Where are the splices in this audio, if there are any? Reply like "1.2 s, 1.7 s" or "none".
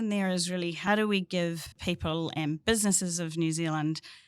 0.8 s, 1.7 s